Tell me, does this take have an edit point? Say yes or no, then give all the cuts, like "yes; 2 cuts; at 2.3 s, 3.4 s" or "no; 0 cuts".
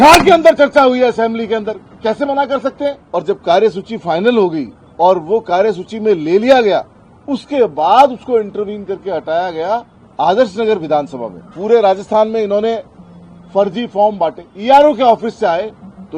yes; 3 cuts; at 3.0 s, 10.0 s, 14.5 s